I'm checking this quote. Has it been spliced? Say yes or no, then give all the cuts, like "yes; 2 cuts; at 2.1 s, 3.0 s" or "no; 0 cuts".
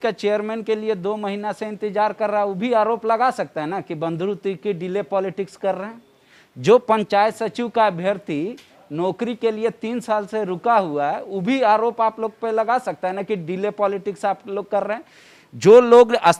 no; 0 cuts